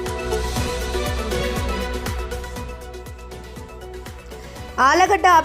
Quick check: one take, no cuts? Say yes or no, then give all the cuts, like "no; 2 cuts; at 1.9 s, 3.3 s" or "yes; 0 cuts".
no; 3 cuts; at 2.4 s, 3.1 s, 4.2 s